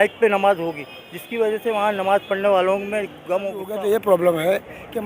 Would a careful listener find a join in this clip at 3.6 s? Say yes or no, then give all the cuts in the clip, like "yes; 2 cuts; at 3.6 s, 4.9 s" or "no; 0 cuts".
yes; 1 cut; at 3.6 s